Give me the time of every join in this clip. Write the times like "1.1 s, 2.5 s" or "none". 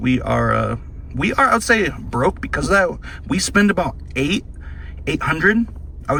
none